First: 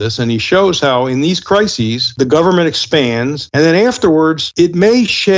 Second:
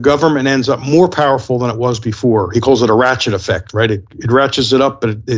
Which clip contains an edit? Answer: first; 3 cuts; at 2.1 s, 3.4 s, 4.4 s

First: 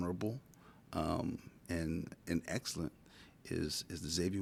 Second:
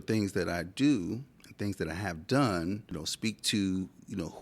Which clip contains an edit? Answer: second; 1 cut; at 3.0 s

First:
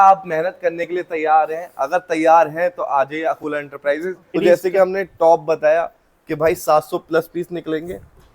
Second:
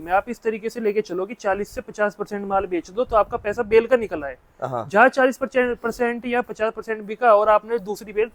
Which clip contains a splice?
first; 1 cut; at 4.3 s

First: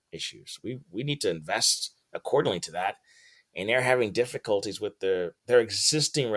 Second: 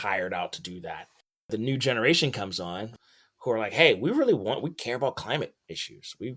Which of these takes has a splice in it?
second; 2 cuts; at 1.5 s, 2.9 s

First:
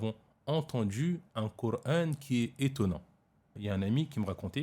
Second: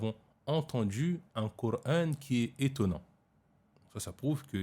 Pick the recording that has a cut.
first; 1 cut; at 3.5 s

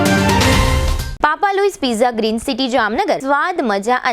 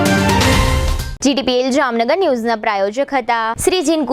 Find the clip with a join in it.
first; 1 cut; at 1.0 s

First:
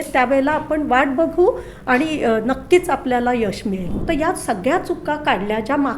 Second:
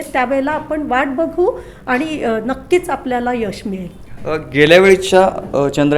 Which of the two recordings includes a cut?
first; 1 cut; at 3.9 s

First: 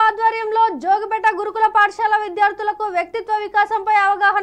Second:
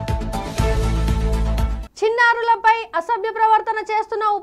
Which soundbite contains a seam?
second; 1 cut; at 1.7 s

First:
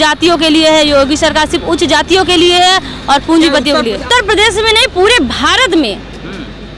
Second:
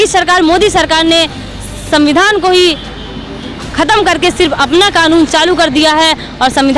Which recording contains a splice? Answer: first; 1 cut; at 4.0 s

